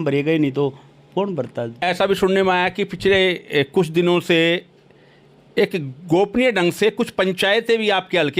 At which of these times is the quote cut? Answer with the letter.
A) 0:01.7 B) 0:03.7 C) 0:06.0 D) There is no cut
A